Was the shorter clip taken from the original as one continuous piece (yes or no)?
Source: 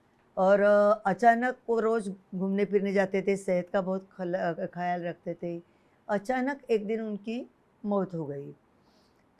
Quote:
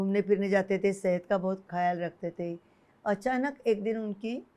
no